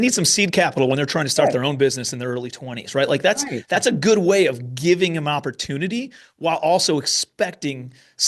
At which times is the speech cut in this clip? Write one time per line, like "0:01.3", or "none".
none